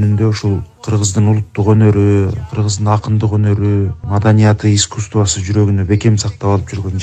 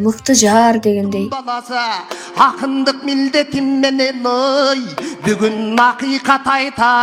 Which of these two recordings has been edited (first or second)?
second